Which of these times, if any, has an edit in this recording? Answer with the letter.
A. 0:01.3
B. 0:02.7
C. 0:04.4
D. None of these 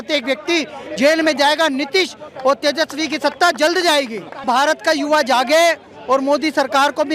C